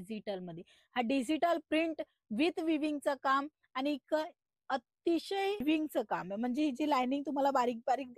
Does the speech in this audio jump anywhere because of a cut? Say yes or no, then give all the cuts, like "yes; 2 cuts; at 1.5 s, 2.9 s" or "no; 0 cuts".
yes; 1 cut; at 5.6 s